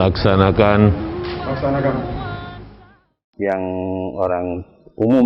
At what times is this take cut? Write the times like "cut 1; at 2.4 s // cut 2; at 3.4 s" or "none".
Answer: cut 1; at 3.2 s